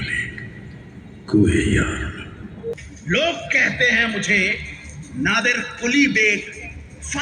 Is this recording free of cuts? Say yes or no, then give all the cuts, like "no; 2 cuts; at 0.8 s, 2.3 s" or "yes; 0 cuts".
no; 1 cut; at 2.7 s